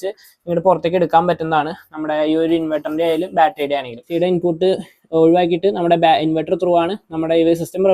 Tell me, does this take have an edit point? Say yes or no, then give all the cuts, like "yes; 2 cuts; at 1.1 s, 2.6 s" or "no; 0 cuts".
yes; 1 cut; at 4.1 s